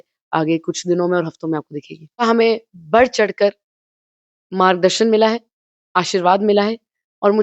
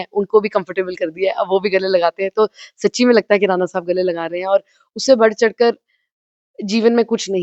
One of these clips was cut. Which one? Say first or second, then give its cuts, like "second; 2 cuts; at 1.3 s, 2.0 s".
first; 1 cut; at 2.2 s